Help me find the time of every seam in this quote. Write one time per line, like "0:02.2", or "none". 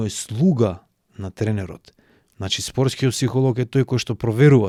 none